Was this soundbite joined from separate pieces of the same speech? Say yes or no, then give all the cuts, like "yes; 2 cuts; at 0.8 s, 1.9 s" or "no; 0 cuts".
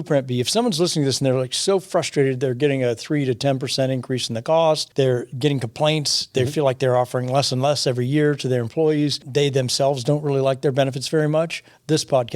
yes; 2 cuts; at 4.9 s, 9.2 s